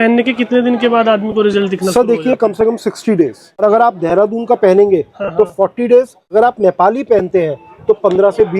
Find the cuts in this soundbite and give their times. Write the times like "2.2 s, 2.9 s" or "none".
3.6 s, 6.3 s